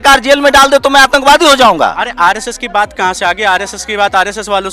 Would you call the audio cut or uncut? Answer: uncut